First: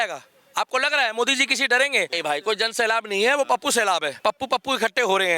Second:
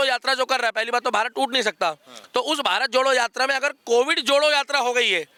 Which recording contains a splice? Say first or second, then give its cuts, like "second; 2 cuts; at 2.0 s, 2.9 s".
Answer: first; 2 cuts; at 2.1 s, 4.1 s